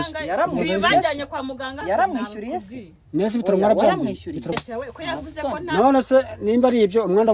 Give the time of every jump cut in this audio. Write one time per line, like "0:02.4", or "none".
0:04.5